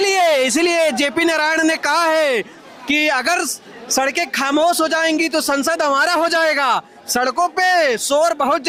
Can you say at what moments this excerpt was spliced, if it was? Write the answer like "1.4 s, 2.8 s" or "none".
none